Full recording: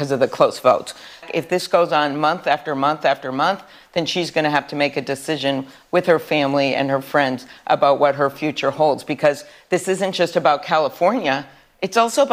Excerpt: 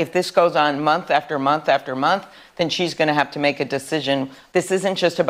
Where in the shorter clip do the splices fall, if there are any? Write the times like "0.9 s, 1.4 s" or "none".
4.4 s